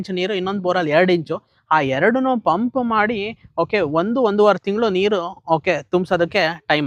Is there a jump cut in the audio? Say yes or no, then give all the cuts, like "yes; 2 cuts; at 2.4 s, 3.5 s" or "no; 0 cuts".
no; 0 cuts